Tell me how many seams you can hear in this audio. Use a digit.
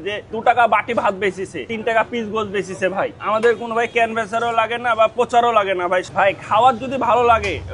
3